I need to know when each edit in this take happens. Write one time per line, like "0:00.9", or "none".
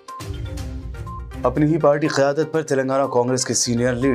0:01.2